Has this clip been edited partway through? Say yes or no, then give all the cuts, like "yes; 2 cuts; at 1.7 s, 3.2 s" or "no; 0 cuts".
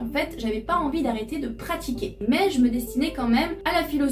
no; 0 cuts